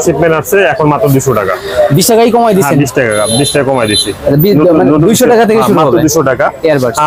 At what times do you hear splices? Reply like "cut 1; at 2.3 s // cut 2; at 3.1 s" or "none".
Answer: none